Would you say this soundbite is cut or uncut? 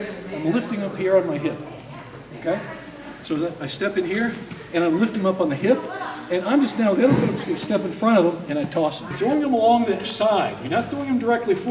cut